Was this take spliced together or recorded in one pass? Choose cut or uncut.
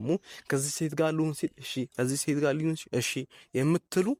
uncut